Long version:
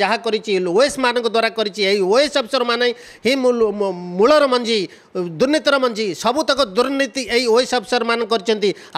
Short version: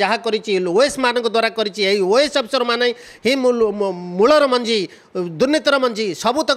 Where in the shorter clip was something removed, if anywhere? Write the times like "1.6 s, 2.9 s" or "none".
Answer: none

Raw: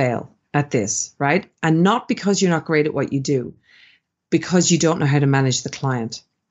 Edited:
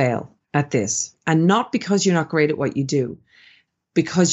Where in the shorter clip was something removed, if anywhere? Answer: 1.1 s

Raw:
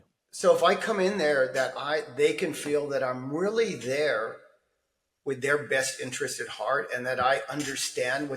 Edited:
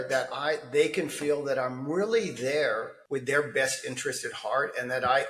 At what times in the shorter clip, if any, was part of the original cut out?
2.9 s

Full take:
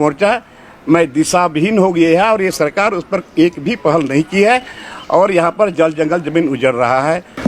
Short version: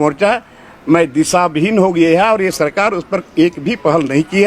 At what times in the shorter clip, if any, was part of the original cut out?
none

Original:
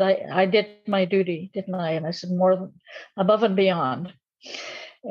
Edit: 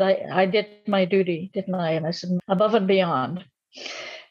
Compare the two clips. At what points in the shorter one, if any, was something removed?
2.4 s

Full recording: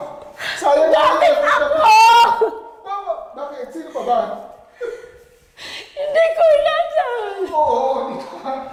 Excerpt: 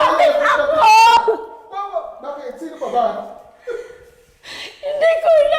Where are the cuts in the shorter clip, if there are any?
1.1 s

